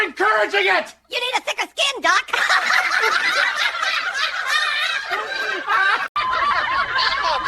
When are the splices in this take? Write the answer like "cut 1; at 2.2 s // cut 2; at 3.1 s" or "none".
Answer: cut 1; at 6.1 s

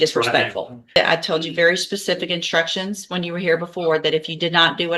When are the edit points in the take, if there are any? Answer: cut 1; at 1.0 s

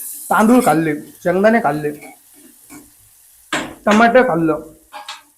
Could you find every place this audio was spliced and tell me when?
none

